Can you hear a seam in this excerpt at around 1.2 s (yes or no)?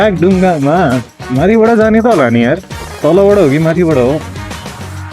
yes